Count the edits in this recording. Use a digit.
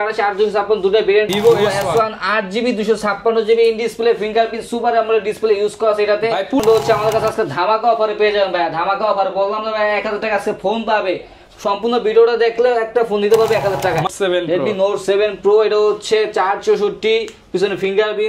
3